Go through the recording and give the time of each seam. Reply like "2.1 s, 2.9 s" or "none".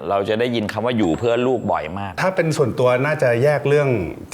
2.2 s